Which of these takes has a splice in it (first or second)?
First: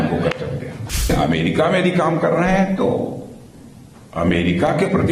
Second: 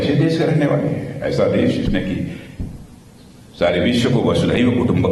first